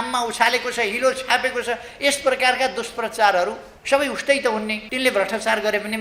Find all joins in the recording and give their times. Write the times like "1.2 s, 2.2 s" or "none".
3.7 s, 4.8 s

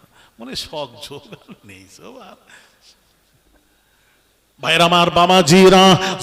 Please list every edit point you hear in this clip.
4.7 s

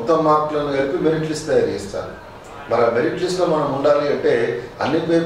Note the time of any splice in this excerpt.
none

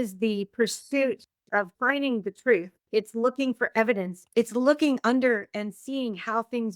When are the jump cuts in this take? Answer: 1.7 s

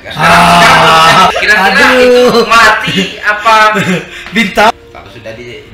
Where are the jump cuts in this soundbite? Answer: 1.3 s, 4.7 s

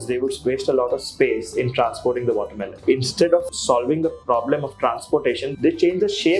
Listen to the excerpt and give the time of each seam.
2.8 s, 3.5 s, 5.5 s

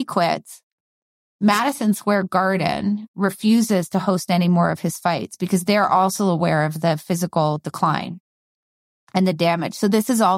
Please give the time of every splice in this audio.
none

